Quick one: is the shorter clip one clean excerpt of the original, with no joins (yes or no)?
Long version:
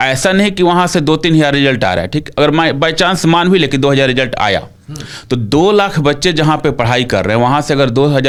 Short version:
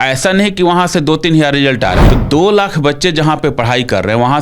no